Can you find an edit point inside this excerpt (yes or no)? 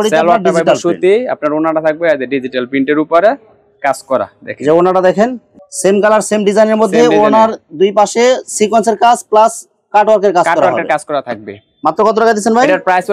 no